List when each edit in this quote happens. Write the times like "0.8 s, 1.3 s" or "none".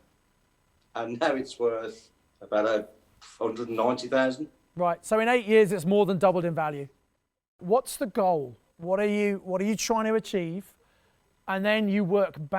7.6 s